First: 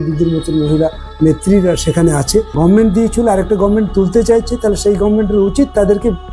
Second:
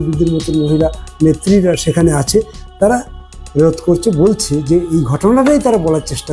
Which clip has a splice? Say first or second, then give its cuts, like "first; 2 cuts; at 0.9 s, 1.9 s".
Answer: first; 1 cut; at 2.5 s